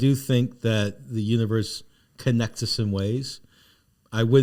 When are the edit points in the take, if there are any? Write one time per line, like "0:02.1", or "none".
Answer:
none